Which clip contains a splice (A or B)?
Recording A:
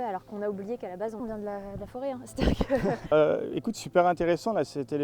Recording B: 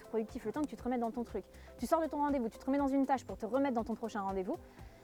A